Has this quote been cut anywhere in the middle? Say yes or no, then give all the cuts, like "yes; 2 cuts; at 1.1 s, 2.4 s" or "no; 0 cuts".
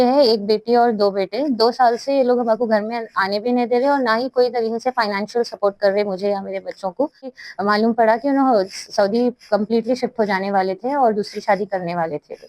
yes; 1 cut; at 7.2 s